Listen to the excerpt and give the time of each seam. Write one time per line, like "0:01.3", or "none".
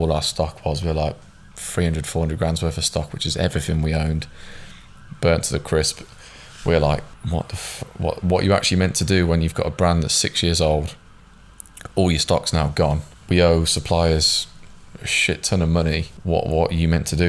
0:07.1
0:13.1
0:16.1